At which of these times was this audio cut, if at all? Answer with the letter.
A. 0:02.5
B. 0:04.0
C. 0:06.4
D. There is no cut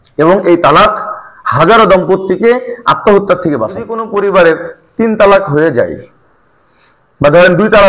B